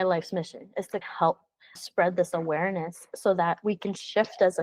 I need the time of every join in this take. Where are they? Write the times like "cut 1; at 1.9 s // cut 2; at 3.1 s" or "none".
cut 1; at 1.0 s